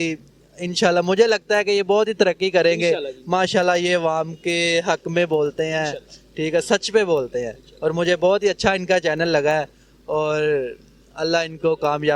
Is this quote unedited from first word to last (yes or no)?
yes